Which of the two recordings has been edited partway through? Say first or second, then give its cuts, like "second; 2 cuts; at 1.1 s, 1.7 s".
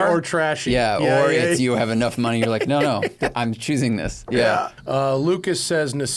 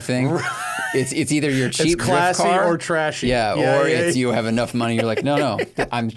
first; 1 cut; at 4.8 s